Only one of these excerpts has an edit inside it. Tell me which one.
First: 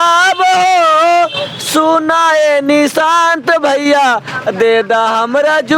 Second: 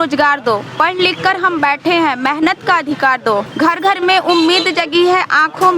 second; 1 cut; at 3.5 s

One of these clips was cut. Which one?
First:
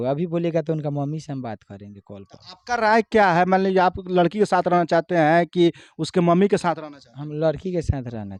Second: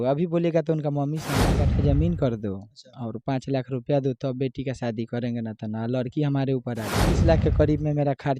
second; 2 cuts; at 1.6 s, 7.2 s

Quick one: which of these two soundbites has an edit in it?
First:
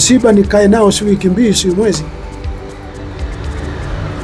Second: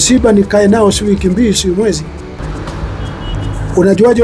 second; 1 cut; at 2.4 s

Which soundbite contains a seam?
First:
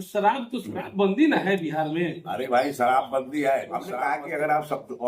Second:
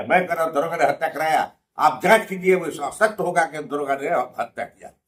first; 1 cut; at 3.9 s

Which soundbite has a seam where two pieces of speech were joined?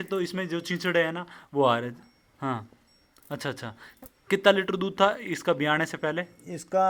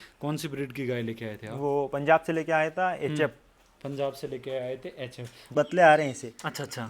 second; 1 cut; at 5.5 s

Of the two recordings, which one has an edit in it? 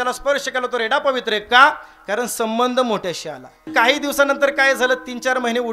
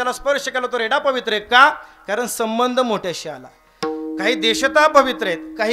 first; 1 cut; at 3.6 s

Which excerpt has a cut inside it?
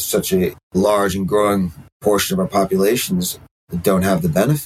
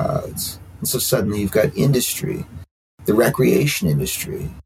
first; 1 cut; at 1.8 s

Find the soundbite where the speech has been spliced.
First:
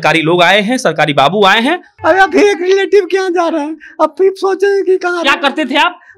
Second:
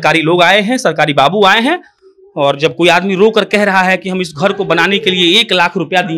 first; 1 cut; at 1.9 s

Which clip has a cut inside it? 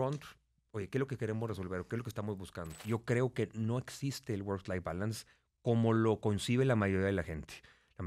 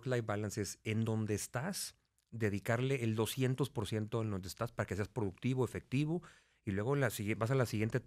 first; 1 cut; at 2.8 s

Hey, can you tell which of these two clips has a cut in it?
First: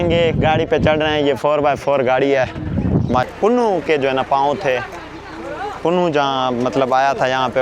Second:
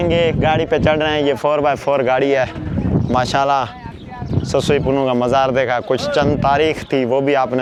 first; 1 cut; at 3.3 s

